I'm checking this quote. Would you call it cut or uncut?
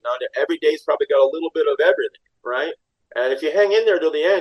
cut